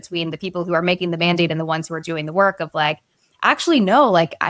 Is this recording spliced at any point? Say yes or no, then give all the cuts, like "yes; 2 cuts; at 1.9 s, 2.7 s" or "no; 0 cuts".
no; 0 cuts